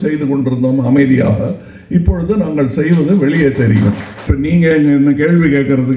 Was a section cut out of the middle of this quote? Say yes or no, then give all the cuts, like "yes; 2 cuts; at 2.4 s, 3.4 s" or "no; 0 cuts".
yes; 1 cut; at 4.3 s